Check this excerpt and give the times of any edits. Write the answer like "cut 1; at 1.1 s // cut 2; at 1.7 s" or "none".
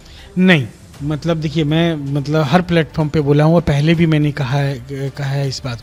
none

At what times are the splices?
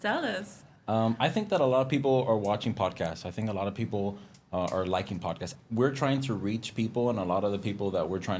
cut 1; at 5.5 s

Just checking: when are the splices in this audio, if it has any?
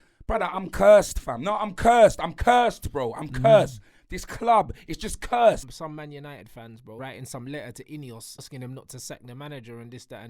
cut 1; at 5.7 s // cut 2; at 7.0 s // cut 3; at 8.5 s

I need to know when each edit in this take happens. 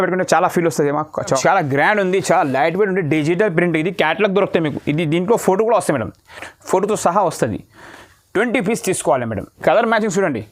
cut 1; at 1.4 s // cut 2; at 9.5 s

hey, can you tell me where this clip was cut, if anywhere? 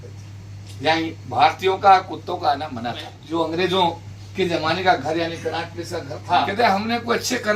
cut 1; at 3.2 s // cut 2; at 6.5 s

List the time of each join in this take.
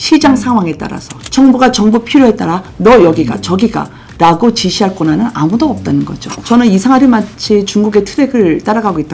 cut 1; at 1.1 s // cut 2; at 6.3 s

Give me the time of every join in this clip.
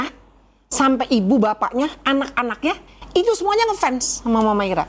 cut 1; at 2.9 s

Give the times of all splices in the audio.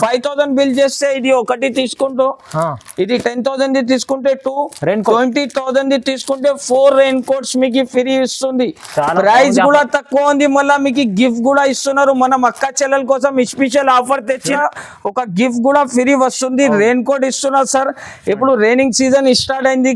cut 1; at 14.6 s

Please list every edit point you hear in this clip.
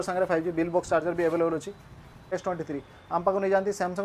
cut 1; at 2.3 s

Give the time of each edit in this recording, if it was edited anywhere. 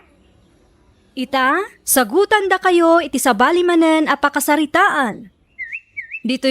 cut 1; at 1.1 s

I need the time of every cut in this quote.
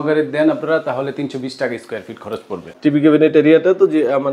cut 1; at 2.7 s

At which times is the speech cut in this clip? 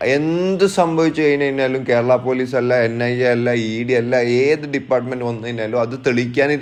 none

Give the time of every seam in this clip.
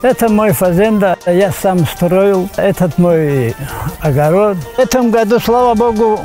cut 1; at 1.2 s // cut 2; at 2.6 s // cut 3; at 4.7 s

